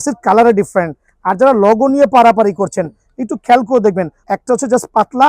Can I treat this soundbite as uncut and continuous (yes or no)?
no